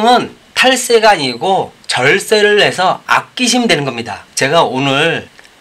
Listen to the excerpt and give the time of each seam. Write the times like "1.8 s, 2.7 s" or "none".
none